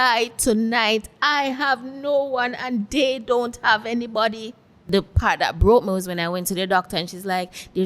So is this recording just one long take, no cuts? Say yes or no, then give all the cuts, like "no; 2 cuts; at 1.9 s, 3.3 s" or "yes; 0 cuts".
no; 1 cut; at 4.8 s